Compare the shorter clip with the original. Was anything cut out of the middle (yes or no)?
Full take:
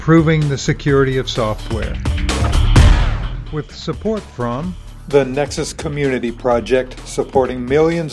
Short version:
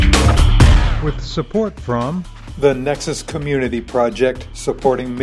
yes